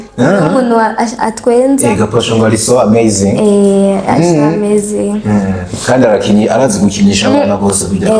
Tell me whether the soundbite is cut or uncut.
uncut